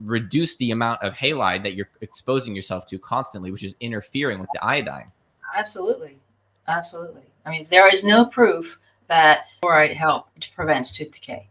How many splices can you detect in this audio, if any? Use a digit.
1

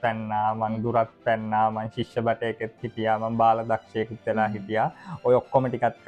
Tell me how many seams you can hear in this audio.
0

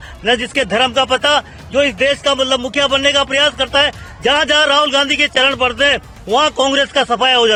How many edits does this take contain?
0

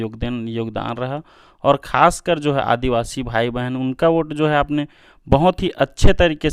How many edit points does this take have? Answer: 0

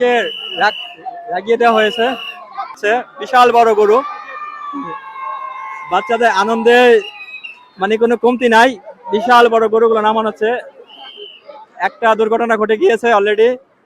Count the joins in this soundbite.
1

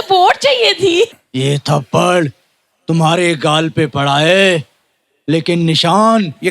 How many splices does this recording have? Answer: 1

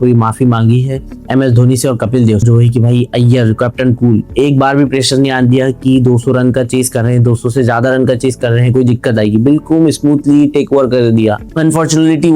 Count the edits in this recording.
2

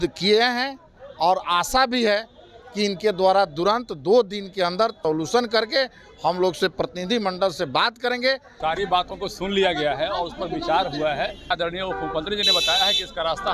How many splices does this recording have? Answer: 3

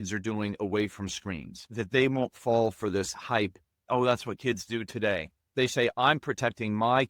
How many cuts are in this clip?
3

